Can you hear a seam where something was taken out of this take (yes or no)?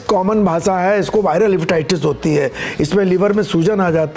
no